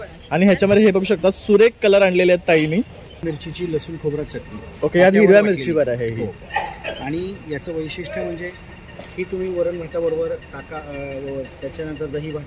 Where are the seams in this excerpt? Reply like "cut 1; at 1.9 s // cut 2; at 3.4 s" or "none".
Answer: cut 1; at 3.2 s